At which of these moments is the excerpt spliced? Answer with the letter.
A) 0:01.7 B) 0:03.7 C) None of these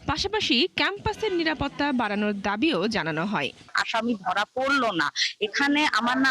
B